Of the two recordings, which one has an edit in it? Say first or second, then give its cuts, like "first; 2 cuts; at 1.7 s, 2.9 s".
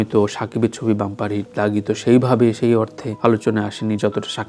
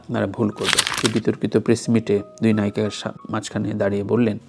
second; 1 cut; at 0.9 s